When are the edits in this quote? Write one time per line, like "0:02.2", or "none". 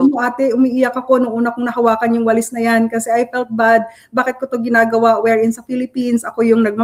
none